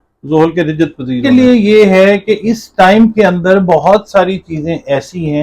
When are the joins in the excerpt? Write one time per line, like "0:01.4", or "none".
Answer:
0:01.2

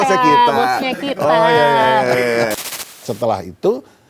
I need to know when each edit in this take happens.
0:02.5

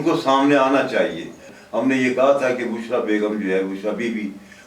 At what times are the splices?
0:01.4

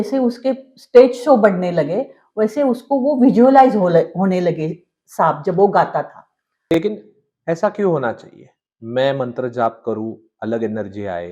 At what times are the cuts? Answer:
0:06.6

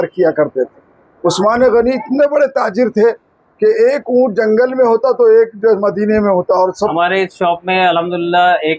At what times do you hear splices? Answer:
0:06.9

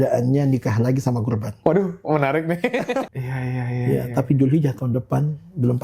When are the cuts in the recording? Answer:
0:03.1

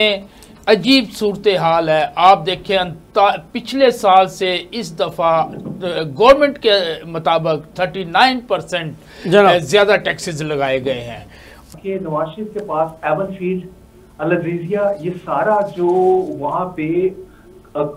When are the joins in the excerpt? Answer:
0:11.7

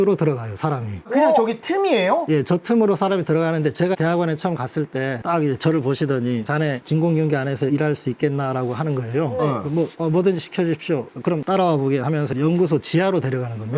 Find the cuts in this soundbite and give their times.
none

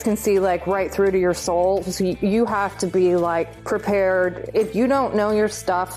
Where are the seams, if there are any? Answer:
0:03.6
0:04.5

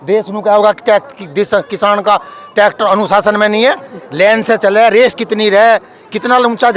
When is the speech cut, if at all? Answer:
none

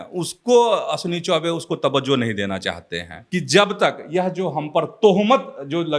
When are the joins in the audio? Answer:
0:03.1

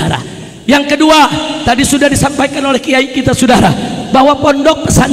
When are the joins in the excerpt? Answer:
none

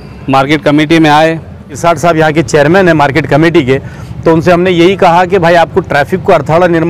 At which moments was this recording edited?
0:01.7

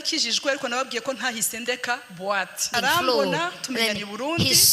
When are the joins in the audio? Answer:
0:02.6

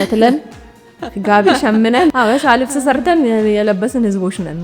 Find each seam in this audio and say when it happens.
0:02.1

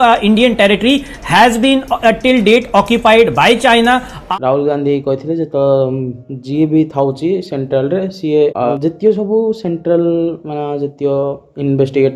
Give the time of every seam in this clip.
0:04.2

